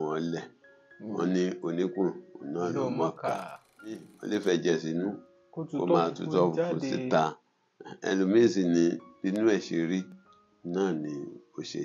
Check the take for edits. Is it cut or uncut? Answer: cut